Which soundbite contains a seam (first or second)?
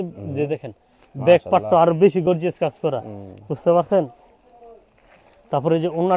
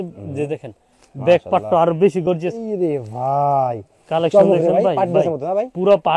second